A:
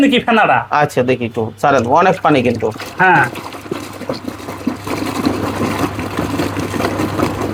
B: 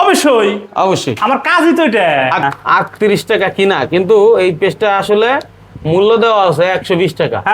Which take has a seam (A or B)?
B